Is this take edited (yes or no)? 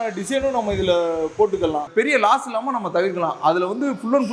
yes